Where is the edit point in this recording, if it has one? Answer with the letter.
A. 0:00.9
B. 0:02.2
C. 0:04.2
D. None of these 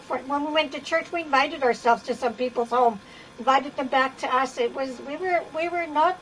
D